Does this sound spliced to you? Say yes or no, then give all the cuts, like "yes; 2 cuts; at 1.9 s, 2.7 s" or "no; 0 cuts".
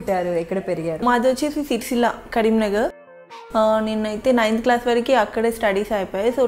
yes; 2 cuts; at 1.0 s, 3.0 s